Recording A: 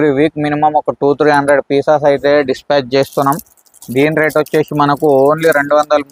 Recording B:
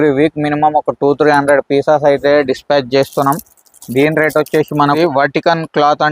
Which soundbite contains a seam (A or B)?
B